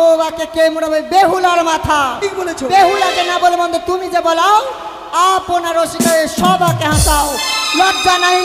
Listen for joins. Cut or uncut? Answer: uncut